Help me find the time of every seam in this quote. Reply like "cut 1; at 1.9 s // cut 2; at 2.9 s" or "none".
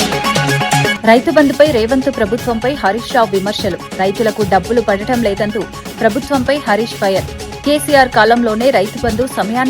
cut 1; at 0.9 s

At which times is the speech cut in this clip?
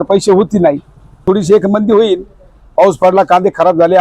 cut 1; at 1.2 s

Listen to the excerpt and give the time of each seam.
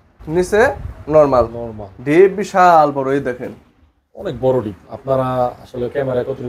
none

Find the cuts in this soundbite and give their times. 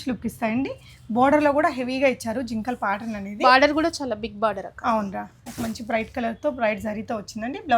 cut 1; at 5.5 s

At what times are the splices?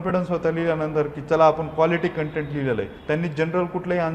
cut 1; at 3.0 s

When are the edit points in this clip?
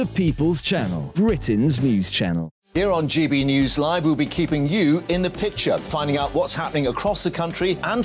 none

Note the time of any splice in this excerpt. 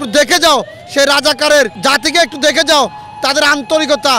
cut 1; at 1.7 s

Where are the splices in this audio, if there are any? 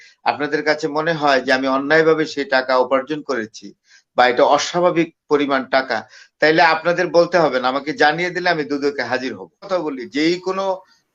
cut 1; at 9.7 s

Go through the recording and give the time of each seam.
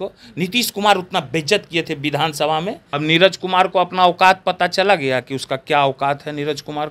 cut 1; at 2.8 s

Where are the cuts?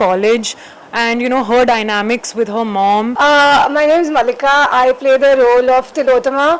cut 1; at 3.1 s

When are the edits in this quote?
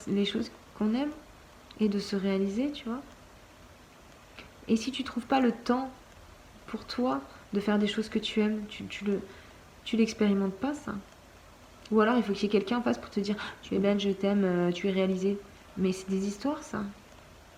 none

